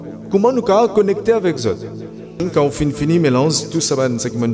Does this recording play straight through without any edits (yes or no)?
no